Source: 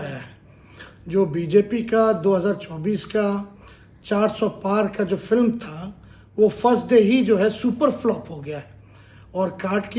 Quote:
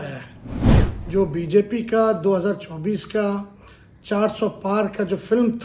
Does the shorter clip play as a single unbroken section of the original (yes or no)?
yes